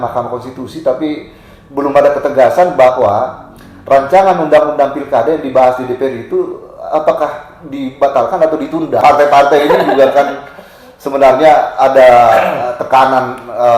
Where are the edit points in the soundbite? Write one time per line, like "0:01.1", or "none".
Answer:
0:09.0